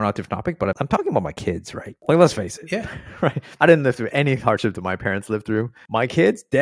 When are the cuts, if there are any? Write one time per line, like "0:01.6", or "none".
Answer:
0:00.8
0:03.4
0:05.8